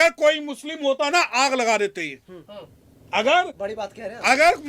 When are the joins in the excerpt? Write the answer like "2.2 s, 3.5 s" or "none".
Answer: 1.0 s